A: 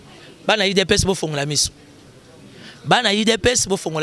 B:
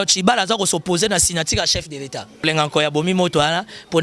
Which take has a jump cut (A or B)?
B